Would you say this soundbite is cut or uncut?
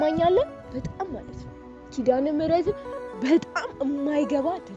uncut